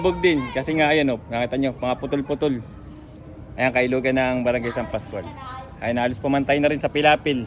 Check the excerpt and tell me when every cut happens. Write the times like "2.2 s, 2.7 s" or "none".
none